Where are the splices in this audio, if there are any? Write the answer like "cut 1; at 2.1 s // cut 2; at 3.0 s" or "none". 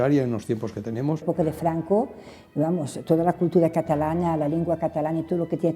cut 1; at 1.2 s